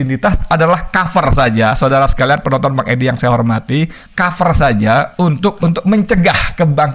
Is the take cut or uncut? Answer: cut